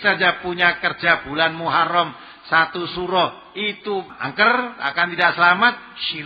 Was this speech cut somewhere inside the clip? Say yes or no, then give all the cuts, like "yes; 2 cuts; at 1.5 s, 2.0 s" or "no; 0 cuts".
yes; 1 cut; at 4.2 s